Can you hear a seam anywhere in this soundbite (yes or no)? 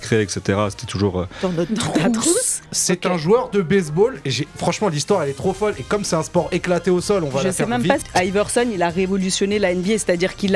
yes